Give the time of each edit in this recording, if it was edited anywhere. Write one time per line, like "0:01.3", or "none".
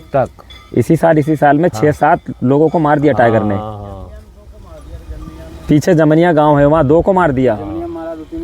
none